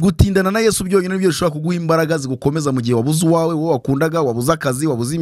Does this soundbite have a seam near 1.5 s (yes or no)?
no